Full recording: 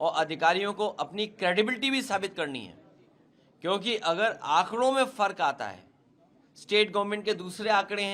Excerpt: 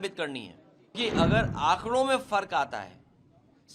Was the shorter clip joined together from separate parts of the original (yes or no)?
yes